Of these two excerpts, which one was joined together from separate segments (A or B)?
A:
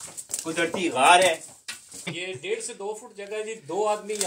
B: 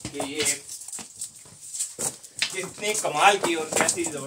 A